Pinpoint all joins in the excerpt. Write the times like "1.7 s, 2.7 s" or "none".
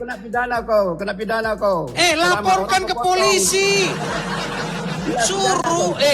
none